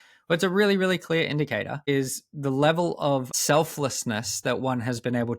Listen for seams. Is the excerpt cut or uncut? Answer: cut